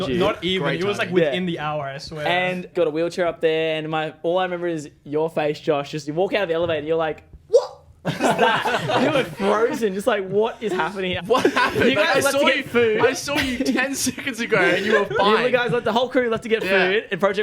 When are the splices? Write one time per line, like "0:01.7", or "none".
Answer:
0:02.7
0:11.1